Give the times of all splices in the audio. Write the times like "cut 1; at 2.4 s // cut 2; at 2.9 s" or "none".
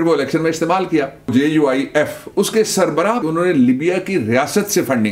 cut 1; at 1.3 s // cut 2; at 3.2 s